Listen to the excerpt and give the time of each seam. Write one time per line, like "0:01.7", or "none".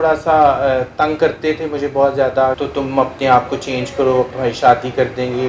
0:02.6
0:04.3